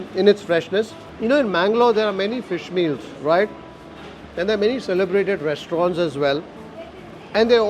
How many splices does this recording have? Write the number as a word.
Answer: one